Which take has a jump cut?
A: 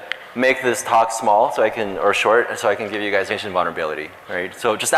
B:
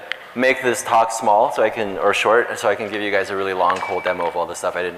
B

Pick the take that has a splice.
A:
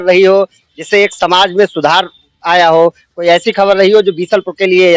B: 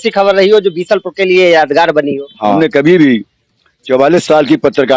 B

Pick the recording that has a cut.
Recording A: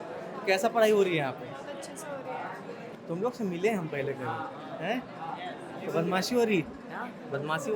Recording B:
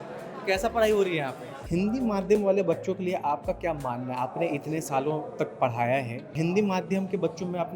B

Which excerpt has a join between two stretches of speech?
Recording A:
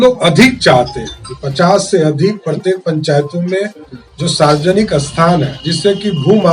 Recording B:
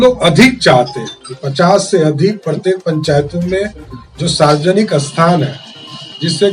A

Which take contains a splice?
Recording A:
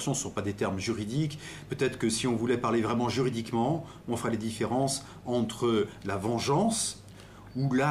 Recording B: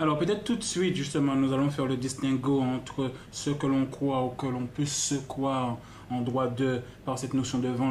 A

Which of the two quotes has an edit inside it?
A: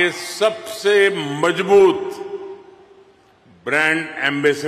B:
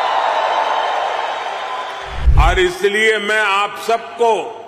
B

